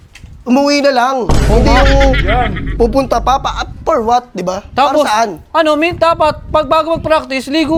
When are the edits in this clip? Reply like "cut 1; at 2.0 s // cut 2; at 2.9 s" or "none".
none

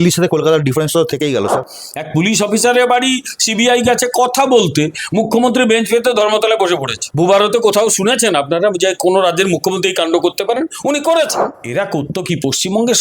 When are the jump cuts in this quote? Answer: cut 1; at 1.7 s // cut 2; at 11.5 s

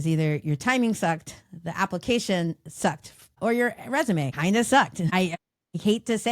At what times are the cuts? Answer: cut 1; at 3.3 s // cut 2; at 4.3 s // cut 3; at 5.4 s

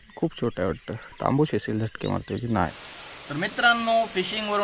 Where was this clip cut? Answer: cut 1; at 2.5 s

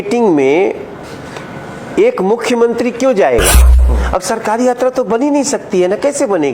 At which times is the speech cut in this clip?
cut 1; at 3.8 s

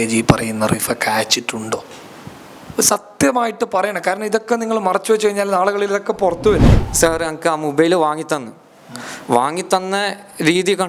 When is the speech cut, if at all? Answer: cut 1; at 6.7 s

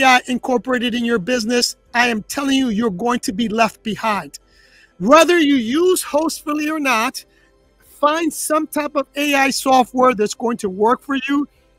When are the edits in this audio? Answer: none

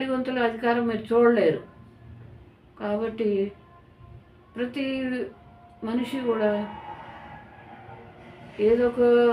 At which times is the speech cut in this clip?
none

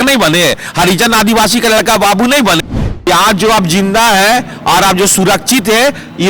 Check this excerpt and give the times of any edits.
cut 1; at 2.8 s

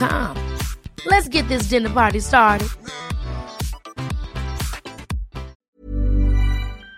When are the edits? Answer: cut 1; at 5.6 s

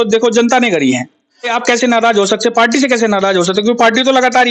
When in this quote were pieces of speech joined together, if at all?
cut 1; at 1.5 s

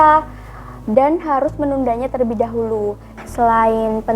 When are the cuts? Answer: cut 1; at 3.2 s

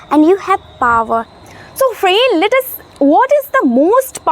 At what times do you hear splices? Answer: cut 1; at 1.4 s

